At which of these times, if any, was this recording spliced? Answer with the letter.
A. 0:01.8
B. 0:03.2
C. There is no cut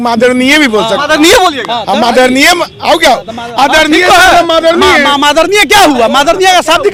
C